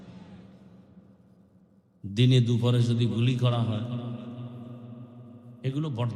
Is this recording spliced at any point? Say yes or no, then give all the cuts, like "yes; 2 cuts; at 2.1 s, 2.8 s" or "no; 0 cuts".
yes; 1 cut; at 1.9 s